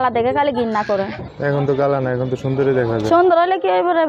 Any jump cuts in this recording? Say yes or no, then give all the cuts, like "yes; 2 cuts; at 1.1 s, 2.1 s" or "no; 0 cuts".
yes; 1 cut; at 1.3 s